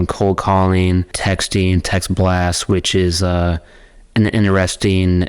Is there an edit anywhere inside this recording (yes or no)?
yes